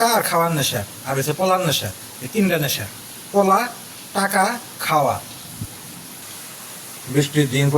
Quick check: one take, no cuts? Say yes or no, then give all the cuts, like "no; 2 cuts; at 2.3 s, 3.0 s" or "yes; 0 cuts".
no; 1 cut; at 6.2 s